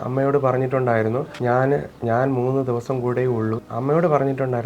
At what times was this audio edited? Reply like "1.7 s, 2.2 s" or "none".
3.7 s